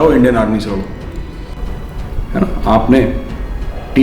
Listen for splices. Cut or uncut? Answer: cut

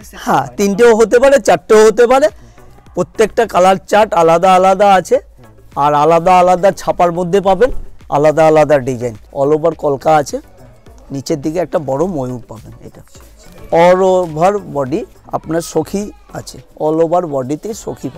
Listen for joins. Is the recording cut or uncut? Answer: cut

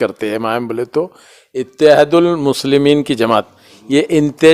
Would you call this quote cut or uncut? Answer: uncut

